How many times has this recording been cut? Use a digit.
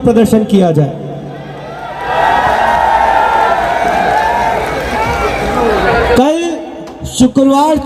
1